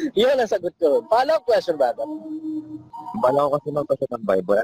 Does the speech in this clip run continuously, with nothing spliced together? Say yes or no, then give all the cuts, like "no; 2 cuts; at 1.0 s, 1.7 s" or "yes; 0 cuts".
no; 1 cut; at 3.0 s